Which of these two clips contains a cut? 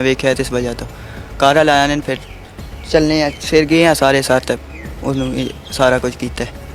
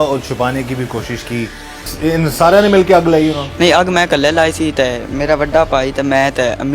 second; 1 cut; at 1.8 s

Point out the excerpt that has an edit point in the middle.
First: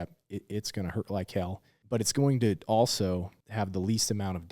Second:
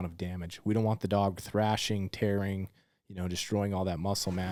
first; 2 cuts; at 1.7 s, 3.4 s

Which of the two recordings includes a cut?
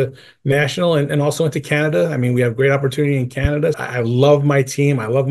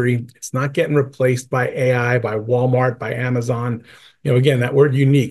first; 1 cut; at 3.8 s

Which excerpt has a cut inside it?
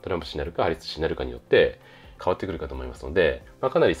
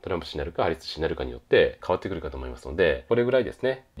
second; 2 cuts; at 1.8 s, 3.1 s

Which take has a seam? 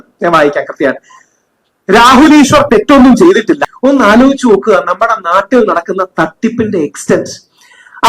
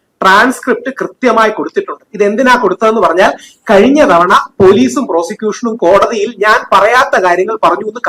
first; 1 cut; at 3.7 s

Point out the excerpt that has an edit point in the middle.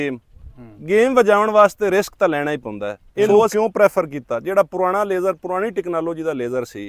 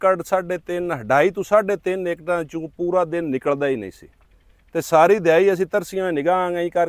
first; 1 cut; at 3.5 s

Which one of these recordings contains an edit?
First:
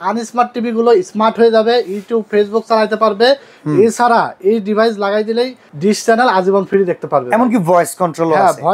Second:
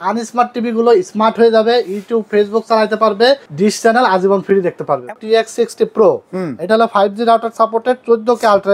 second; 2 cuts; at 3.5 s, 5.1 s

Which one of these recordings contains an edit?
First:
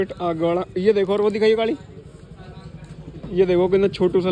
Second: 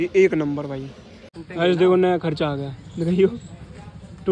second; 1 cut; at 1.3 s

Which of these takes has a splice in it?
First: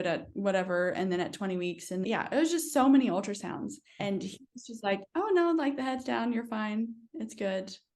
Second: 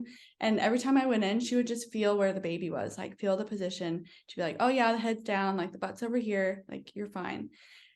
first; 2 cuts; at 2.0 s, 4.0 s

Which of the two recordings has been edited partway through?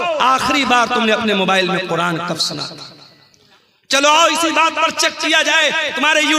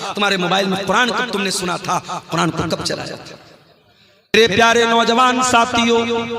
second; 1 cut; at 4.3 s

